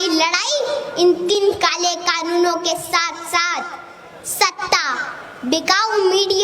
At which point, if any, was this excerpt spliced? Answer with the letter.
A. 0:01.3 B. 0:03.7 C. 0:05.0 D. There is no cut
A